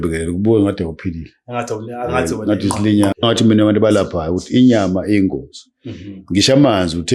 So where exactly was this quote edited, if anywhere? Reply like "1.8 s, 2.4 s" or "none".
3.2 s